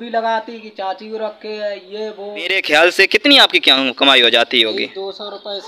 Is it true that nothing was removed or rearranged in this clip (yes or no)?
no